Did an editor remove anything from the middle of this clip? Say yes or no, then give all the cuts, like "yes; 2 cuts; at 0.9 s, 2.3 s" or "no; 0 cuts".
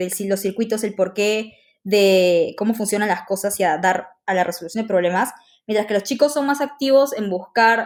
no; 0 cuts